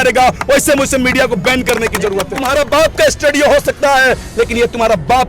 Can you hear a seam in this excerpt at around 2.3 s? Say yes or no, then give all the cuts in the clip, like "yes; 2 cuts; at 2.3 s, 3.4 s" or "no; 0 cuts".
yes; 1 cut; at 2.3 s